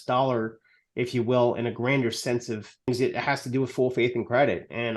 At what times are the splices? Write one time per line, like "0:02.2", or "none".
0:02.9